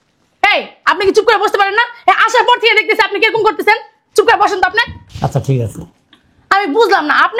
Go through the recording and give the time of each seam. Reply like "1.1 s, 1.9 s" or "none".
5.0 s

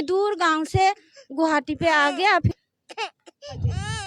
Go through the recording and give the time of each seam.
2.6 s

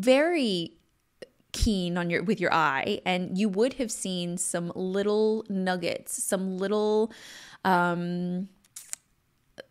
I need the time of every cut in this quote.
none

